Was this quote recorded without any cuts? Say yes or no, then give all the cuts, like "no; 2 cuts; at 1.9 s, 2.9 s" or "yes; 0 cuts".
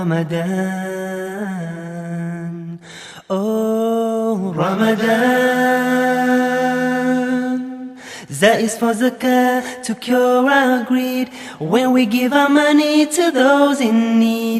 yes; 0 cuts